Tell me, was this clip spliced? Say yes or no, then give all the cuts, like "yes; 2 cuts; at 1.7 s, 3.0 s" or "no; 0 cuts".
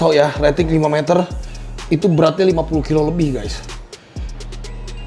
no; 0 cuts